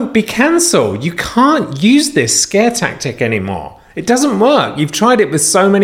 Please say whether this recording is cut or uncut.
uncut